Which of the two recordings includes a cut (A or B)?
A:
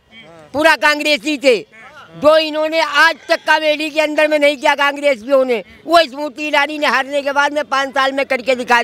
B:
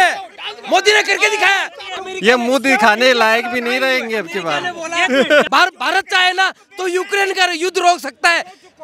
B